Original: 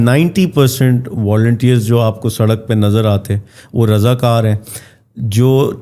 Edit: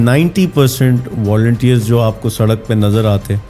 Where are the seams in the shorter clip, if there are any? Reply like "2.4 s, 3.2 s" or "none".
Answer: none